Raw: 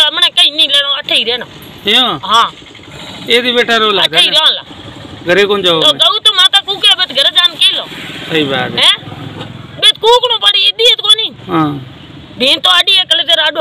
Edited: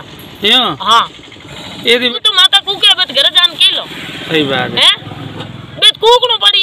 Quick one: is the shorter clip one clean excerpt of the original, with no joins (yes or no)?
no